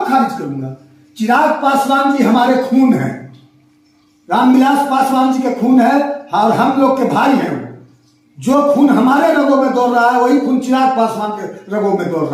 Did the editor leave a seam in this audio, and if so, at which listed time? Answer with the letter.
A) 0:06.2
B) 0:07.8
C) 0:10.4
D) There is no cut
D